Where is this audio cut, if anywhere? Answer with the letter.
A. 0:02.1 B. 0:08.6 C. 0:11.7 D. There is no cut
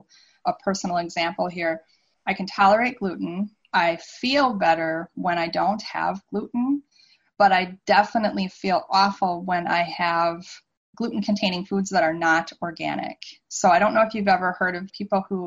D